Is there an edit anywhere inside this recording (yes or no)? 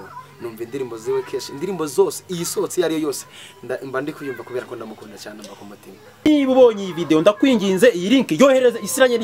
yes